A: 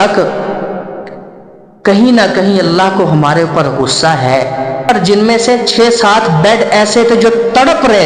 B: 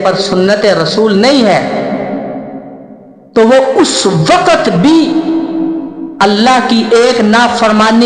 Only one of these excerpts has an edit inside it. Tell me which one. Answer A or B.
A